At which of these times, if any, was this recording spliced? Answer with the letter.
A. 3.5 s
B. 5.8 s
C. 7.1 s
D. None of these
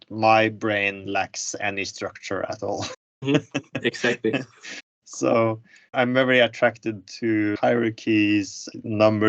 B